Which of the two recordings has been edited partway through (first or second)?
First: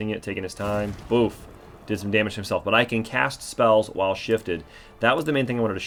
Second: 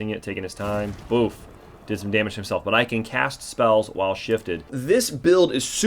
second